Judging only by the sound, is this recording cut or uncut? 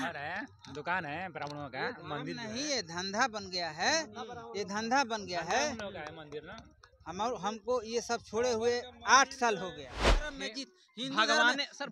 cut